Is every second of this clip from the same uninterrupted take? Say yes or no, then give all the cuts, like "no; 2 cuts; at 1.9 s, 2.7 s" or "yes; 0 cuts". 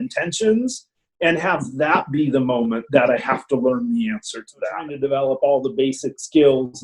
no; 1 cut; at 4.9 s